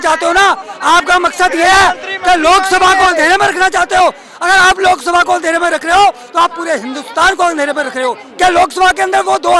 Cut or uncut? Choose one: cut